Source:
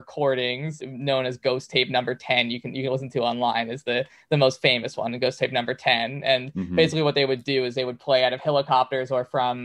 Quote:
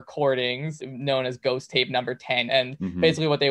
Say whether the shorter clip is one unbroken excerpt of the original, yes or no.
no